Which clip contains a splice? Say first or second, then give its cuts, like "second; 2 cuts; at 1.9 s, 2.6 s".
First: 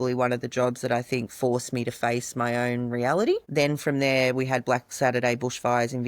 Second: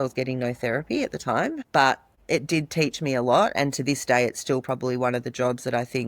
second; 1 cut; at 2.1 s